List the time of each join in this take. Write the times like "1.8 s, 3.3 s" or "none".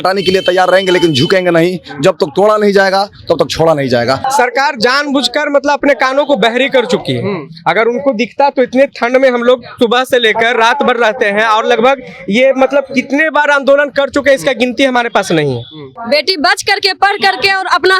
4.2 s, 15.9 s